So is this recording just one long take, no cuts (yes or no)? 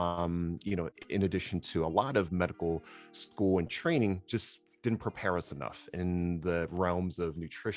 yes